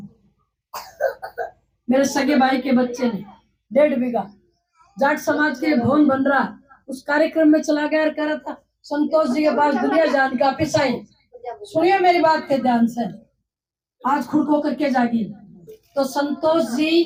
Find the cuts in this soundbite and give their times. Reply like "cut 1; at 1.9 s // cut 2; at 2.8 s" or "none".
none